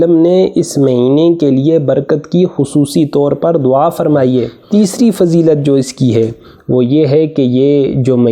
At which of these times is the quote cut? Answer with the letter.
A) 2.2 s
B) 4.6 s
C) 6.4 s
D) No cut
B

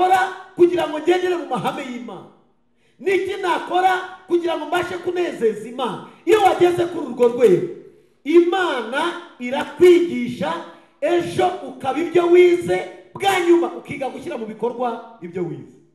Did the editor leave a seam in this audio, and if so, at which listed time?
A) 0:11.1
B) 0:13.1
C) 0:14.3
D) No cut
D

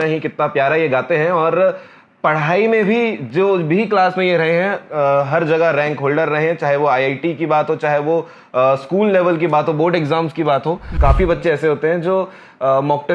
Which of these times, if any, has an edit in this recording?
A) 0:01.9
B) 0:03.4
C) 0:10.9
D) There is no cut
C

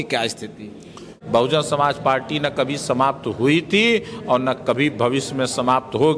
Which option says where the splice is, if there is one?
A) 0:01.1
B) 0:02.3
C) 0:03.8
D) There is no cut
A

